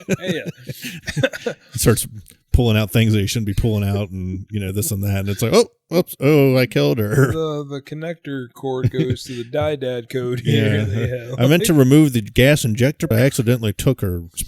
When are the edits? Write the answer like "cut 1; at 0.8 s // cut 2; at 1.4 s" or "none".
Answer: cut 1; at 13.1 s